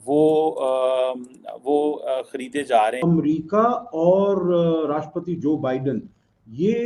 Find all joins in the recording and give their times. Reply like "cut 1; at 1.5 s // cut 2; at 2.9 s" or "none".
cut 1; at 3.0 s